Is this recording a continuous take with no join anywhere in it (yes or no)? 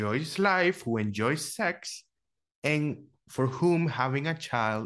yes